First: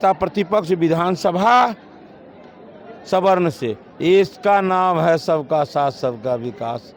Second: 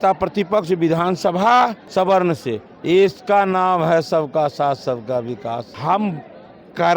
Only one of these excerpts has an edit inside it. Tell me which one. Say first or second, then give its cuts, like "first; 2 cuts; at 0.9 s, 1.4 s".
second; 2 cuts; at 1.8 s, 5.7 s